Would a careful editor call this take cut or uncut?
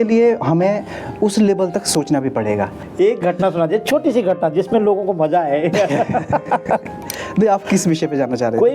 cut